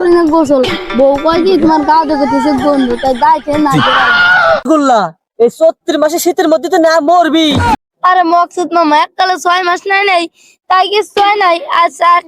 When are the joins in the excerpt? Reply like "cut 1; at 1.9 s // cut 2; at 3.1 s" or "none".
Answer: cut 1; at 4.7 s // cut 2; at 7.7 s

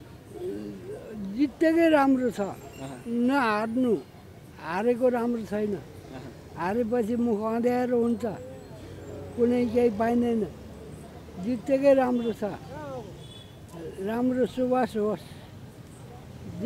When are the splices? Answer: none

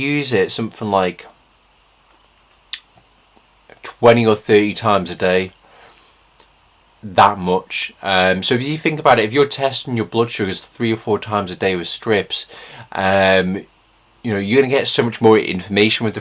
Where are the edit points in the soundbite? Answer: cut 1; at 4.7 s

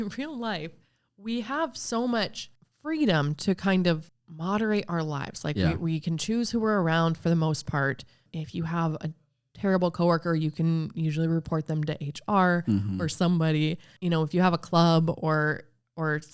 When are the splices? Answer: cut 1; at 4.1 s // cut 2; at 8.2 s // cut 3; at 13.9 s

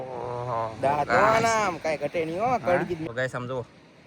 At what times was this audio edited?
cut 1; at 3.1 s

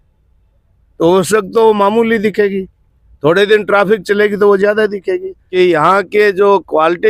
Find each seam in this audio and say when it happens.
cut 1; at 5.4 s

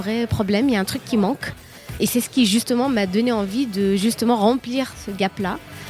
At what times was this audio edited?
cut 1; at 2.0 s

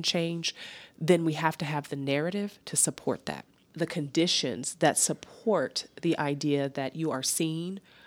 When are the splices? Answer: cut 1; at 3.7 s

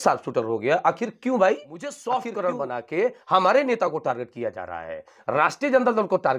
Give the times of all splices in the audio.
cut 1; at 2.0 s

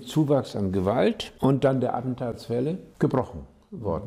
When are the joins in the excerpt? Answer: cut 1; at 1.3 s // cut 2; at 2.9 s

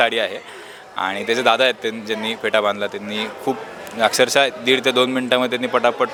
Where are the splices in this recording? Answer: none

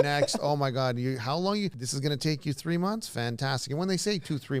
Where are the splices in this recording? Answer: cut 1; at 1.9 s

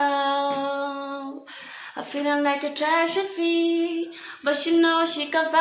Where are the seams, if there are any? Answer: none

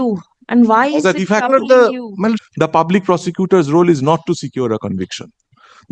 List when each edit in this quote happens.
cut 1; at 2.4 s

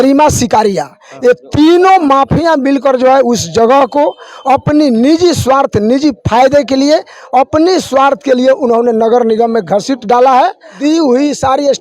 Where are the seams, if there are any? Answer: cut 1; at 10.8 s

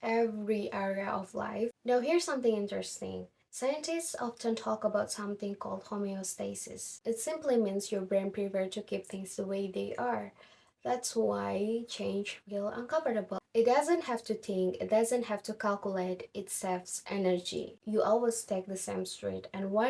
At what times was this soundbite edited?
cut 1; at 1.7 s // cut 2; at 13.4 s // cut 3; at 17.8 s

